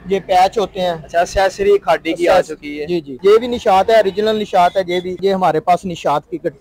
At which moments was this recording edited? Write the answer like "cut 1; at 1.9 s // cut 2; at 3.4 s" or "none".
cut 1; at 3.1 s // cut 2; at 5.2 s

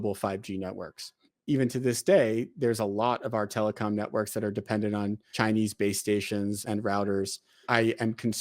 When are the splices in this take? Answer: cut 1; at 1.3 s // cut 2; at 5.3 s // cut 3; at 6.6 s // cut 4; at 7.7 s

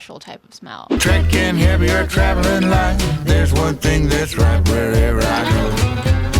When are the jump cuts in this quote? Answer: cut 1; at 0.9 s

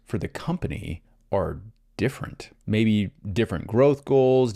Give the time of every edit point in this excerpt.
cut 1; at 2.6 s

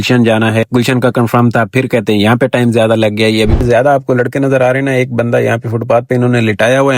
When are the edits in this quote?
cut 1; at 3.5 s

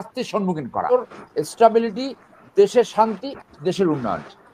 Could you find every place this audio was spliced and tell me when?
cut 1; at 0.9 s

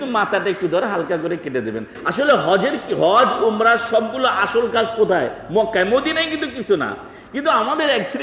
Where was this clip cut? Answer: cut 1; at 1.9 s

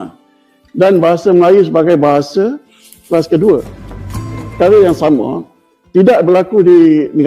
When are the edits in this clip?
cut 1; at 4.3 s

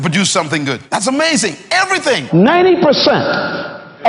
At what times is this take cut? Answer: cut 1; at 0.8 s // cut 2; at 2.2 s

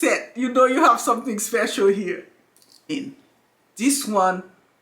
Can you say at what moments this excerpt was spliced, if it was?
cut 1; at 2.9 s

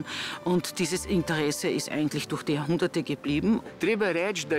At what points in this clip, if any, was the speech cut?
cut 1; at 3.6 s

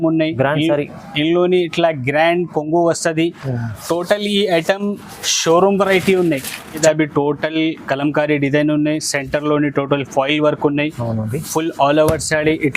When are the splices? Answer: cut 1; at 6.8 s

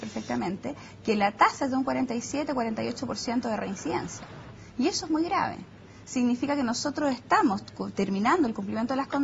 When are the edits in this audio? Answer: cut 1; at 1.3 s

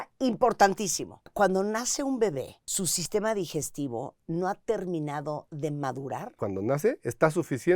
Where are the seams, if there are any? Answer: cut 1; at 1.3 s // cut 2; at 2.6 s // cut 3; at 6.4 s

